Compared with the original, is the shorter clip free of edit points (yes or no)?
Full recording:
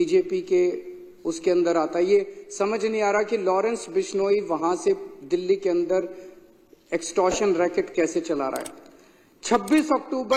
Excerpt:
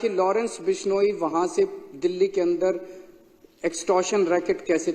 yes